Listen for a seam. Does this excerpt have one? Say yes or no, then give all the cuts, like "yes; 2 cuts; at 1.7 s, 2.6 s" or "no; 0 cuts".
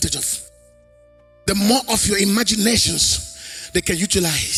no; 0 cuts